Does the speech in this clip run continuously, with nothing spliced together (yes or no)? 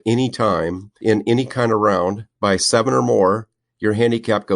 no